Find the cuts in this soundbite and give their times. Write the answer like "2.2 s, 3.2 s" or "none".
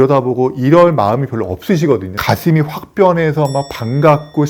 2.1 s